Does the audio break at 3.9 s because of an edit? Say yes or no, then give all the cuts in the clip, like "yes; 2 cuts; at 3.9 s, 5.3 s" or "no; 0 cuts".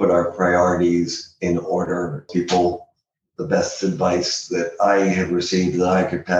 no; 1 cut; at 2.3 s